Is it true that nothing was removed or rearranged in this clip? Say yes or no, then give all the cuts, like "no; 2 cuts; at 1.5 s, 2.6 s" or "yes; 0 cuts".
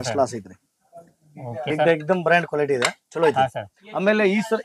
no; 1 cut; at 1.7 s